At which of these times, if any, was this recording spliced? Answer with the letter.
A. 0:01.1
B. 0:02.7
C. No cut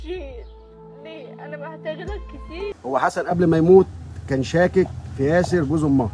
B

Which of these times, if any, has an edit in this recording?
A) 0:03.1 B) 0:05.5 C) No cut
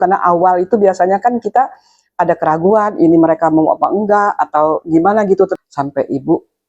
B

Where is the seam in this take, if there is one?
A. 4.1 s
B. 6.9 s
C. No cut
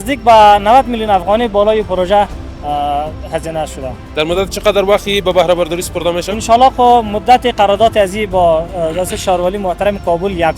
C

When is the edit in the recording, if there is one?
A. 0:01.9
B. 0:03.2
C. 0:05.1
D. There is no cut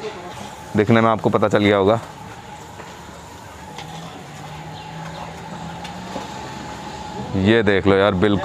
D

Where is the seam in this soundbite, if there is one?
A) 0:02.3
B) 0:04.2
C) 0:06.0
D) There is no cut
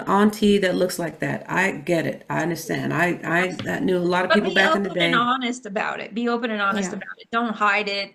D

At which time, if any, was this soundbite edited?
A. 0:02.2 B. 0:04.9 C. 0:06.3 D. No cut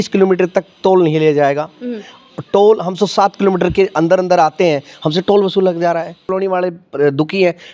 C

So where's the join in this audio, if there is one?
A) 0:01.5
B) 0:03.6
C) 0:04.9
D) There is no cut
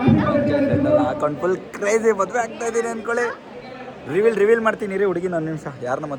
D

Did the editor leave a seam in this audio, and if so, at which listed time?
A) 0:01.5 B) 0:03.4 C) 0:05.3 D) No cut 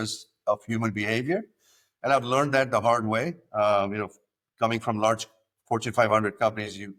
D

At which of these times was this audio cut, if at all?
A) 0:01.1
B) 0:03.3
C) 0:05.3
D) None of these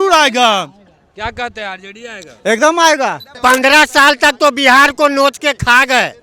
B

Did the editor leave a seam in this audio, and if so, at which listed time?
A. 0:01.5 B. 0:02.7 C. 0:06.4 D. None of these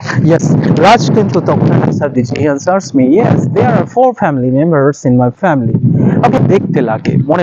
C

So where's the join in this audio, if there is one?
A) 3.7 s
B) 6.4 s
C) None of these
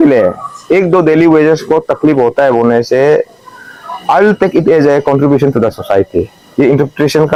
C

